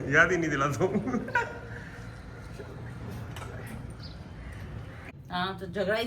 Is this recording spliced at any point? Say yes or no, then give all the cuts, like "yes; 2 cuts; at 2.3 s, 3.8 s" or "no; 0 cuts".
yes; 1 cut; at 5.0 s